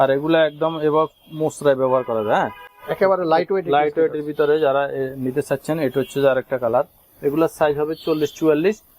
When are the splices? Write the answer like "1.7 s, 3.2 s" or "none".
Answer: none